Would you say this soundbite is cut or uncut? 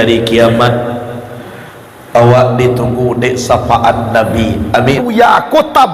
cut